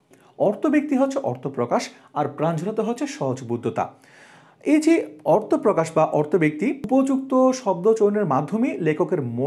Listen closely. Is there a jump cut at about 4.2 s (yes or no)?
no